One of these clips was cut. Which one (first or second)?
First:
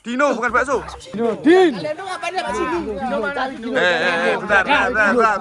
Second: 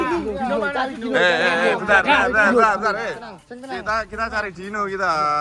first